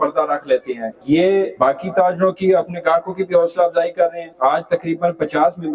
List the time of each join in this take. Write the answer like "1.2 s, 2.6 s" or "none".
0.9 s, 1.5 s, 4.2 s